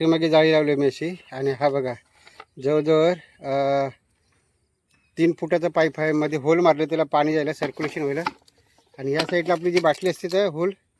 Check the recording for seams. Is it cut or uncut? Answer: uncut